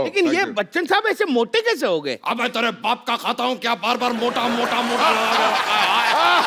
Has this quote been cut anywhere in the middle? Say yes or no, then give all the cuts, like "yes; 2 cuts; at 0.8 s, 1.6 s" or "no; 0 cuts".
no; 0 cuts